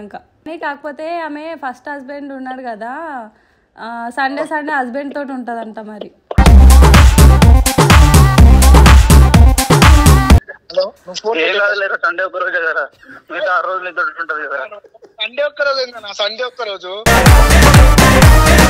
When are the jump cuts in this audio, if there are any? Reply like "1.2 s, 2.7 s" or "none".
none